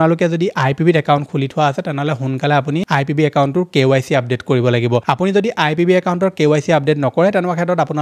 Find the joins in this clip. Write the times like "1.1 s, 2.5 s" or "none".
none